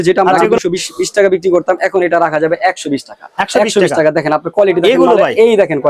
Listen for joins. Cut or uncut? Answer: uncut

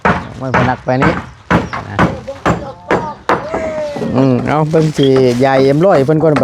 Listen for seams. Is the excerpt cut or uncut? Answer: cut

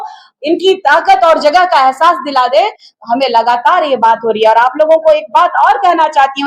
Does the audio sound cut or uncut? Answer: uncut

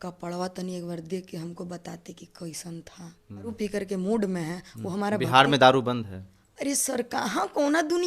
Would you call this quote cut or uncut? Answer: cut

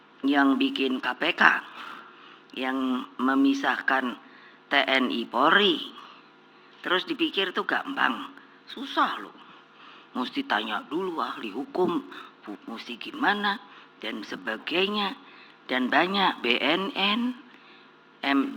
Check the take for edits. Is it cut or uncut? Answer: uncut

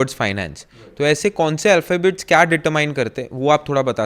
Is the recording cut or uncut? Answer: uncut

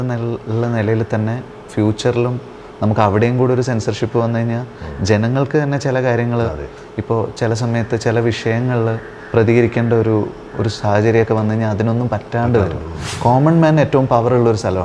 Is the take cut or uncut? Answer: cut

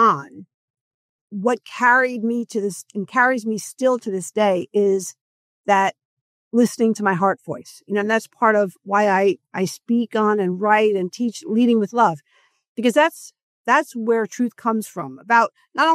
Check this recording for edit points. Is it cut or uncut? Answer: uncut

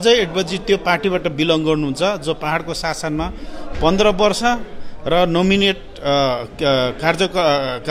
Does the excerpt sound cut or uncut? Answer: uncut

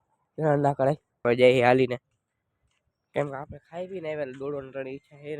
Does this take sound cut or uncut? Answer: cut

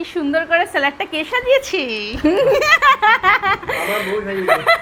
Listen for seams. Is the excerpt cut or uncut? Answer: uncut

